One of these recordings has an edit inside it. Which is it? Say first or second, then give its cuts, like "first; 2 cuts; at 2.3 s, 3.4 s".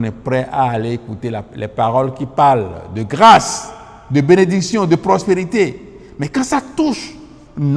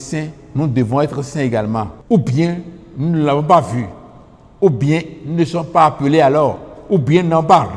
second; 1 cut; at 2.0 s